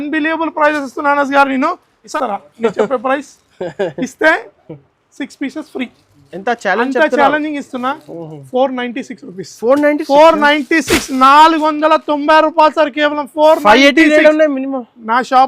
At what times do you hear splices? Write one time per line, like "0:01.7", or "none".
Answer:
0:02.0